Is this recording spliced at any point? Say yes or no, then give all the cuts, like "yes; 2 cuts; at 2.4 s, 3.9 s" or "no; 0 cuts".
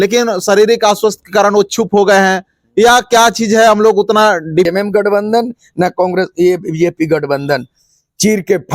yes; 1 cut; at 4.7 s